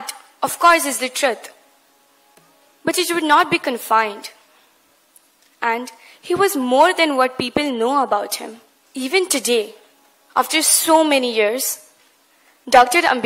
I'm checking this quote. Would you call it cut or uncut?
uncut